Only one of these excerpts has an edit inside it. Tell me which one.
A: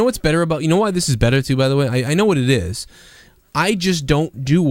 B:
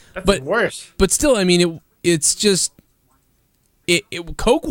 A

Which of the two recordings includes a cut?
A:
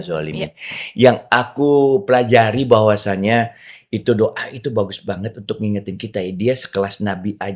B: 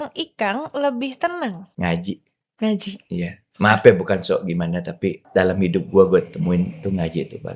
B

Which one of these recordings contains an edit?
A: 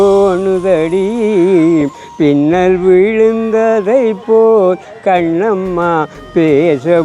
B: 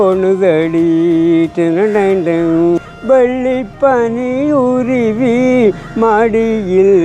B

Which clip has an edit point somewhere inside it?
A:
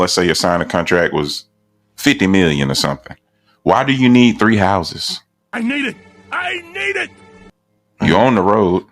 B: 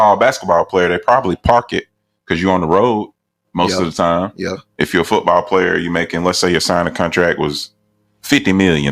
B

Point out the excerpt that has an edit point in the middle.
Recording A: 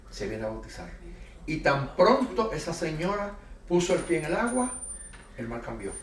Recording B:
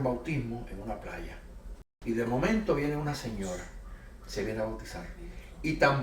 B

